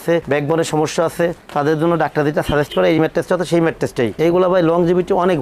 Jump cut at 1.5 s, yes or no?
no